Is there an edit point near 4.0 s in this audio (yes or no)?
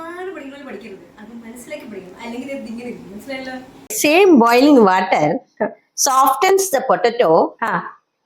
yes